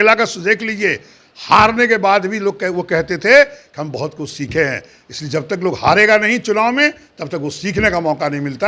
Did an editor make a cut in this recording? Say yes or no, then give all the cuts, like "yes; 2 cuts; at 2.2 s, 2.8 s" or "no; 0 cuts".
no; 0 cuts